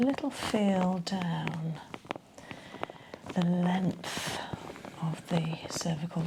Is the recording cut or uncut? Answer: uncut